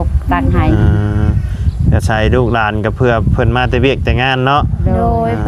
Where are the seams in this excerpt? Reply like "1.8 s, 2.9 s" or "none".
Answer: none